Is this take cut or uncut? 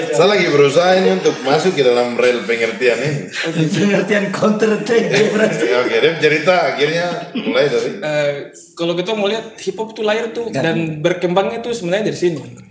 uncut